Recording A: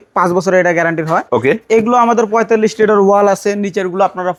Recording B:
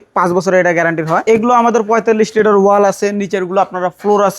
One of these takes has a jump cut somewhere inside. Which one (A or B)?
B